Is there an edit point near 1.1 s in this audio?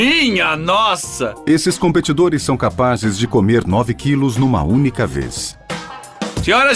yes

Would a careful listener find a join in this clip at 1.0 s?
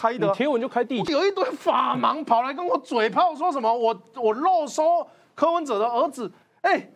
yes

